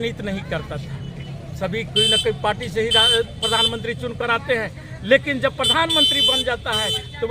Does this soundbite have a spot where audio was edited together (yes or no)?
no